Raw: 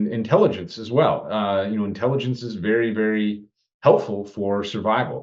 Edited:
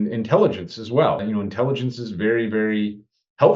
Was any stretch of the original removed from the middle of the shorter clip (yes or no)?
yes